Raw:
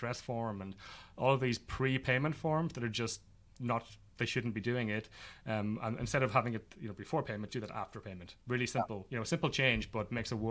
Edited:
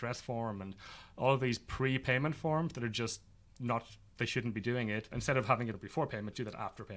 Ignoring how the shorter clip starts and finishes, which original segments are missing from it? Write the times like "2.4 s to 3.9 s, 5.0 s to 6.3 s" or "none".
5.2 s to 6.0 s, 6.7 s to 7.0 s